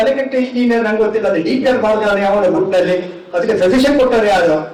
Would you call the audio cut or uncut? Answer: uncut